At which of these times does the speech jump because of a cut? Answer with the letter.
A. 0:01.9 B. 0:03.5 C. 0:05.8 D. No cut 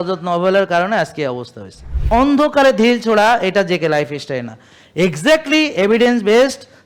A